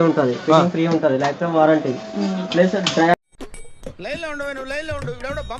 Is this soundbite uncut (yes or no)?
yes